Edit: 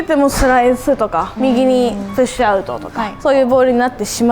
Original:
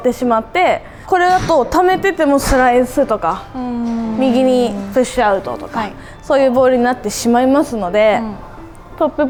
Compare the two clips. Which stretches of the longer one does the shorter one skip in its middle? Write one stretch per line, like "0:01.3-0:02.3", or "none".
0:03.4-0:04.1
0:05.8-0:06.1